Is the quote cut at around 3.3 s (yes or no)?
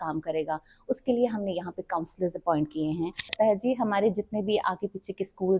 yes